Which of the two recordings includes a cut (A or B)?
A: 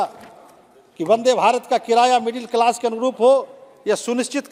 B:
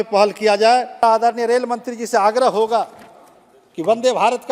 B